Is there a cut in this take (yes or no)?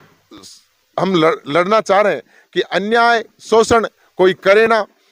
no